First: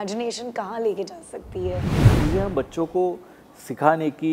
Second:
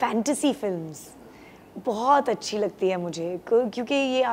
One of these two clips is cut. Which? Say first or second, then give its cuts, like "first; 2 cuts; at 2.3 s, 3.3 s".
first; 1 cut; at 2.1 s